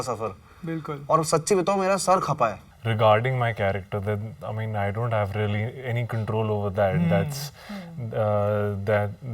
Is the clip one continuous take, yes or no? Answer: no